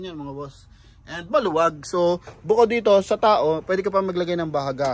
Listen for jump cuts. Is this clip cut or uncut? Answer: uncut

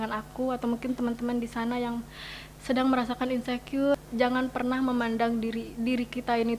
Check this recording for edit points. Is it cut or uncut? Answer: cut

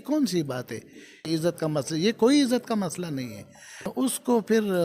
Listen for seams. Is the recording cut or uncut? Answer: cut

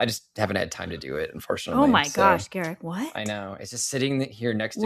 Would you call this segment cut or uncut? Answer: uncut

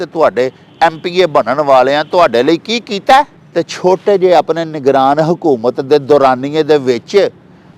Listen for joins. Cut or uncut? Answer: cut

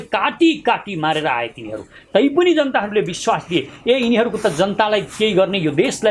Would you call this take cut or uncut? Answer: uncut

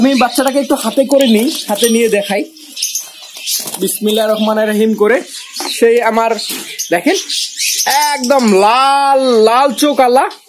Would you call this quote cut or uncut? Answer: uncut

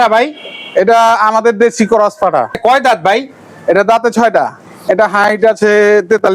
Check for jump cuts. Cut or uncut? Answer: cut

